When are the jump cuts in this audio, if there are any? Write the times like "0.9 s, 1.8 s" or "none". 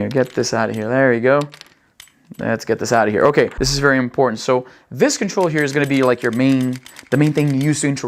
3.6 s